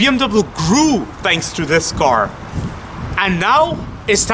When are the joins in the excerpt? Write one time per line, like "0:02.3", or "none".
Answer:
none

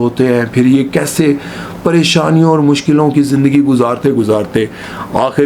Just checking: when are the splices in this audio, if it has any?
none

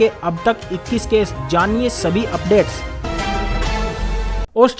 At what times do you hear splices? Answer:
0:02.9
0:04.0

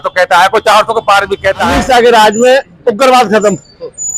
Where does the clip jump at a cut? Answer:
0:01.7

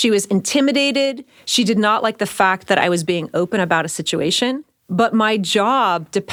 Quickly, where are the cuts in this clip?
none

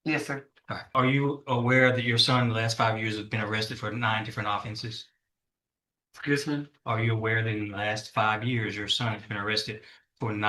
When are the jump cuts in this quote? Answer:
0:00.9

